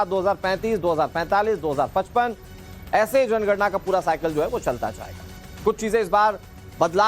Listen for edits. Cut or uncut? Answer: cut